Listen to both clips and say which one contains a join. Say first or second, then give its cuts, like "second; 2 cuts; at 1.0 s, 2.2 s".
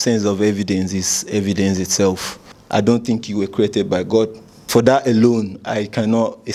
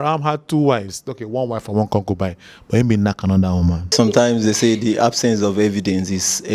second; 1 cut; at 3.8 s